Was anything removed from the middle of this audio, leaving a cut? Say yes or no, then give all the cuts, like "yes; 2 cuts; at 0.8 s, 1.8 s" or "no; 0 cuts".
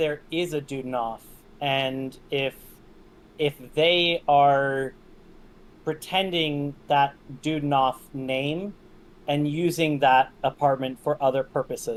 no; 0 cuts